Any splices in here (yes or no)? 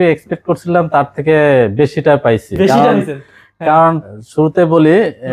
no